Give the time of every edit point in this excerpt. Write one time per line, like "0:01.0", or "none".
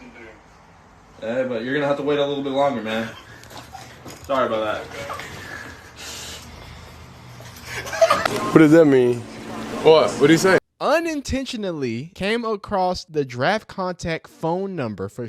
0:10.7
0:12.1
0:13.0